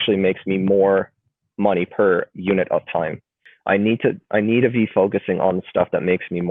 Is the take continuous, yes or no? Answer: no